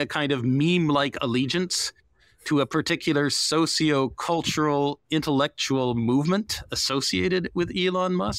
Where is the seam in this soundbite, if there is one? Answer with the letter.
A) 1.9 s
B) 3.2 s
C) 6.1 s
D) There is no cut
D